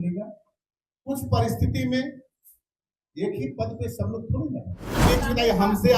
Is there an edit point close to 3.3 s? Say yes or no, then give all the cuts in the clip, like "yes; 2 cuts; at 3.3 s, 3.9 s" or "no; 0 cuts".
no; 1 cut; at 5.0 s